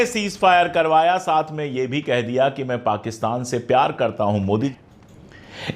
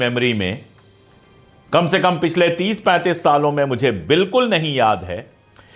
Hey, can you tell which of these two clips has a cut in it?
first; 1 cut; at 4.7 s

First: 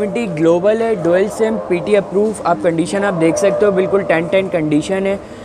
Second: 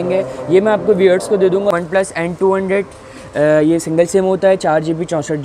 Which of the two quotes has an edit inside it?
second; 1 cut; at 1.7 s

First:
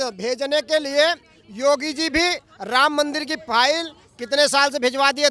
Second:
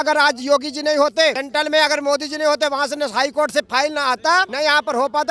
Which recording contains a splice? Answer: second; 2 cuts; at 1.4 s, 4.5 s

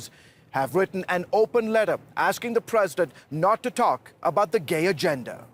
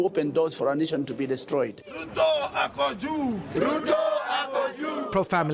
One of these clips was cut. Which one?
second; 1 cut; at 3.7 s

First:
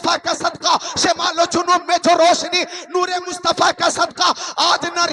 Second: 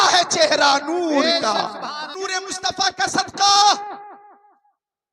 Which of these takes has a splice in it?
second; 1 cut; at 2.1 s

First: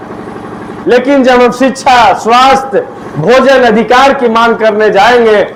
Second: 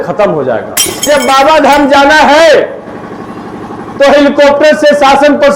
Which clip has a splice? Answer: second; 1 cut; at 1.1 s

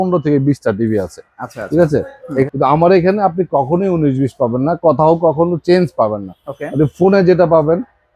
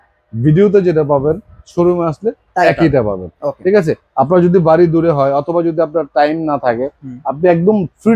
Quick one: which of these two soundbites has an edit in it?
first; 1 cut; at 2.4 s

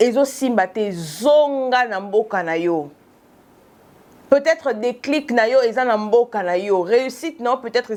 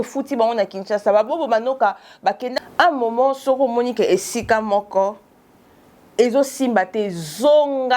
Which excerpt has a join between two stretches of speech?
second; 1 cut; at 2.5 s

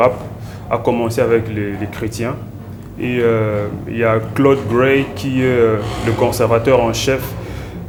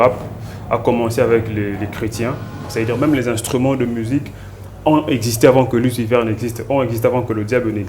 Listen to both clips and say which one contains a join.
second; 1 cut; at 2.6 s

